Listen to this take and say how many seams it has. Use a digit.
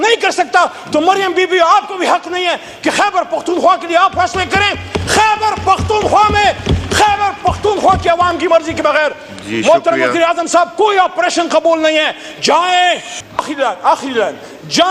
1